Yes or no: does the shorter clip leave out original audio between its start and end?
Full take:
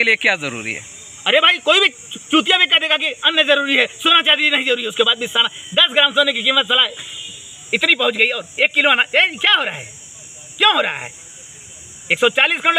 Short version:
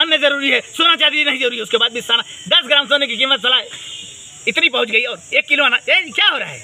no